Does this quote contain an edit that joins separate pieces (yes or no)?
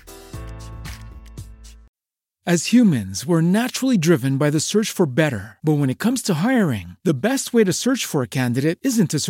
yes